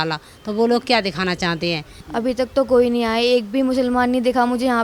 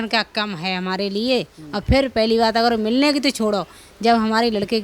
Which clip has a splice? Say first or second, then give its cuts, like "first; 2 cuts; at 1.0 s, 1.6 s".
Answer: first; 1 cut; at 2.0 s